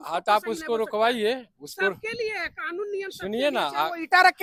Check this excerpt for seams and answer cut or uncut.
uncut